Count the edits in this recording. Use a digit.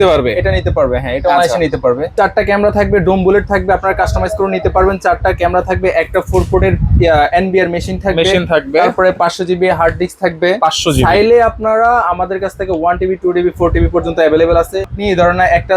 2